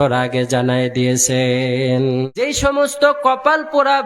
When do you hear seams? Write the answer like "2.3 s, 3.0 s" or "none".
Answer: 2.4 s